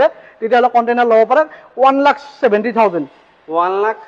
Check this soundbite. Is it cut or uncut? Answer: uncut